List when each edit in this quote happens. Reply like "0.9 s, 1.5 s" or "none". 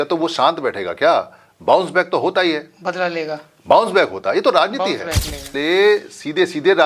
5.5 s